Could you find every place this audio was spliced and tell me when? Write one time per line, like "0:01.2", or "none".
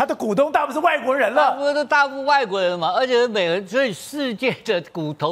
none